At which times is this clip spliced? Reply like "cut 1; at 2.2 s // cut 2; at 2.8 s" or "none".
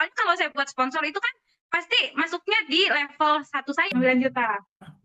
cut 1; at 3.9 s